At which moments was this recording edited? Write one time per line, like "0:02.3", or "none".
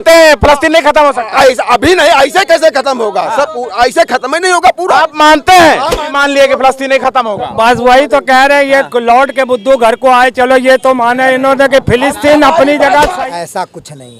0:06.1
0:13.1